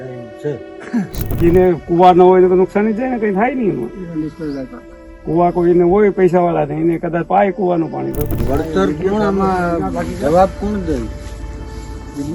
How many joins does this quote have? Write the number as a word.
two